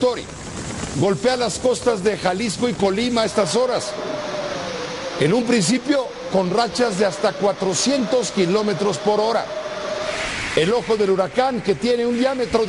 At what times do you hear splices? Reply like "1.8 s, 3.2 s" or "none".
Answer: 4.3 s